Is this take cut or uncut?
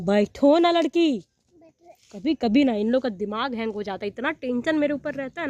uncut